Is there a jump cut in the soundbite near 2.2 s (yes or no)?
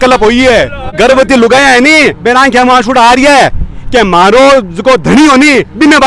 no